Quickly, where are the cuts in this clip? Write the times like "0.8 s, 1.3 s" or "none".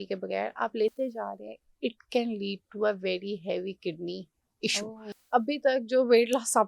5.1 s